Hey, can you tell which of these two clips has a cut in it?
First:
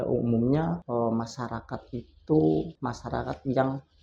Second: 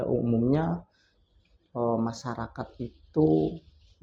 first; 2 cuts; at 0.8 s, 2.8 s

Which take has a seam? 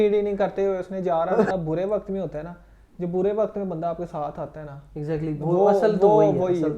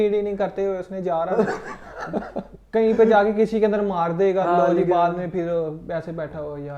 first; 1 cut; at 1.5 s

